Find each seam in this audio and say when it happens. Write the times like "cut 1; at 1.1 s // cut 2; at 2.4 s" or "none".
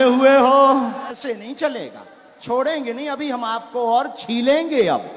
cut 1; at 1.2 s